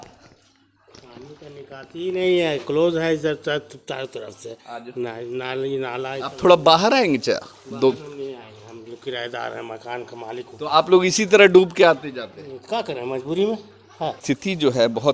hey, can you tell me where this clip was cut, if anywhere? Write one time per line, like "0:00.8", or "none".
0:14.2